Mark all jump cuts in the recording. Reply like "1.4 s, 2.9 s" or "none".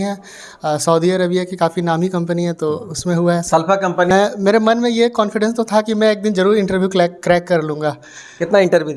4.1 s